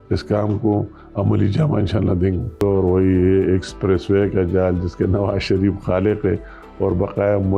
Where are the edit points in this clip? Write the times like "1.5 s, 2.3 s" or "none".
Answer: 2.6 s